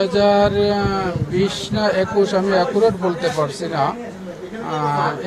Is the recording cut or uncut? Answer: uncut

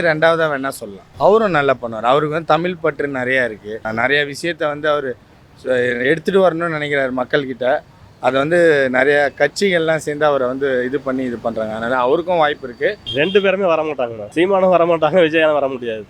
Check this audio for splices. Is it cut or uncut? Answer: cut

